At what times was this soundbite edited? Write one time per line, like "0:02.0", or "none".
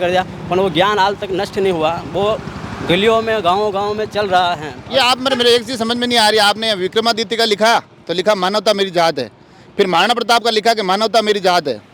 none